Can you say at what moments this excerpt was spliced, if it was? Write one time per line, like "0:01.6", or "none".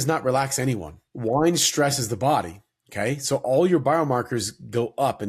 0:01.1

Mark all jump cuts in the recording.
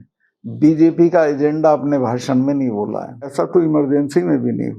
0:03.3

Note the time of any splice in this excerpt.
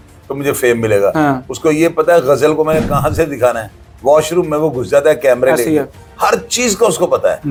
none

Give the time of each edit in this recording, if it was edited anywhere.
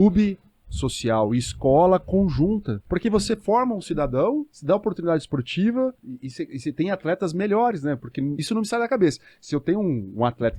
0:02.8
0:04.5
0:06.1
0:08.4

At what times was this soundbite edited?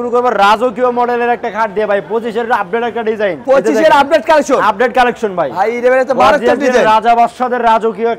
none

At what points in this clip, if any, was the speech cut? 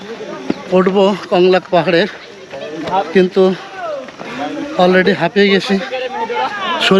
none

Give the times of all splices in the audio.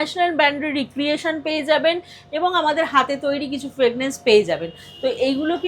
none

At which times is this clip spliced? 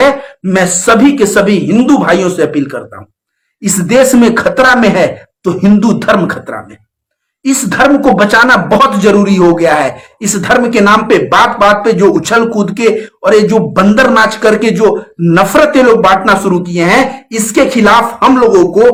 none

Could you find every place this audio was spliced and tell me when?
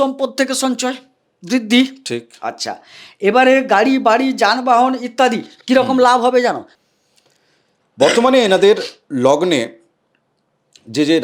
0:06.7

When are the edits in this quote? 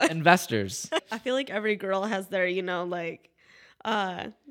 0:01.0

